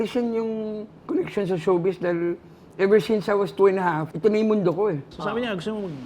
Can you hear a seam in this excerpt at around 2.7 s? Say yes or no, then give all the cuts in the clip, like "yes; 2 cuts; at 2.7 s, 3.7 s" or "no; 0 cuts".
no; 3 cuts; at 1.0 s, 4.1 s, 5.1 s